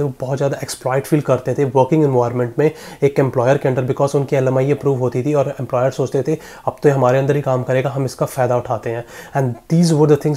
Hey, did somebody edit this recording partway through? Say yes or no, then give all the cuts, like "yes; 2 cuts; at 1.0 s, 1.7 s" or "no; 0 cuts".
no; 0 cuts